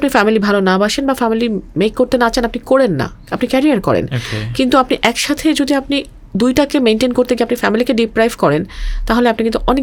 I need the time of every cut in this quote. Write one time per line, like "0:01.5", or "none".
none